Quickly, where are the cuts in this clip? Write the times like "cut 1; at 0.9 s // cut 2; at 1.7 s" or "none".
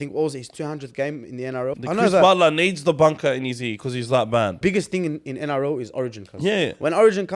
cut 1; at 1.8 s // cut 2; at 4.6 s